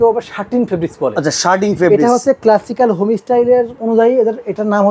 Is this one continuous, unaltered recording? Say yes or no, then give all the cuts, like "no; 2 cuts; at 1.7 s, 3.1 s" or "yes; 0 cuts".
no; 1 cut; at 3.8 s